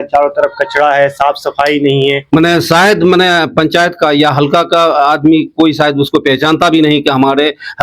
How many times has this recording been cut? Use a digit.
1